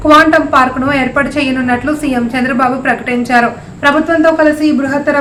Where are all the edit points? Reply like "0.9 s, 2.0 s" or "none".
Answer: none